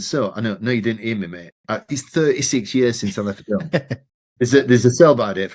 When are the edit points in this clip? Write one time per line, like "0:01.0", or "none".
none